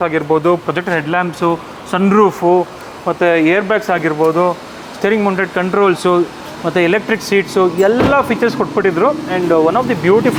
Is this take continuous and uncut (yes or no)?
yes